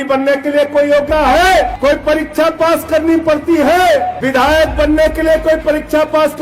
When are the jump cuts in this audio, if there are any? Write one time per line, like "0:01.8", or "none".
0:01.1
0:01.7
0:04.2